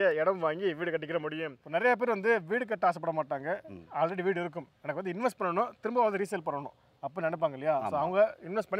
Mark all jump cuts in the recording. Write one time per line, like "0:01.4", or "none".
0:01.6